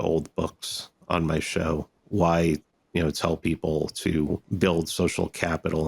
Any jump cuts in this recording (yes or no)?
yes